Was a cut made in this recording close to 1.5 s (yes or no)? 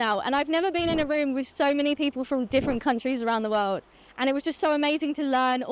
no